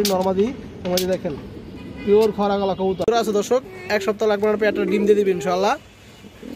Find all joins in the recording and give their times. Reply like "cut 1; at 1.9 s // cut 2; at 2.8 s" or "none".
cut 1; at 3.4 s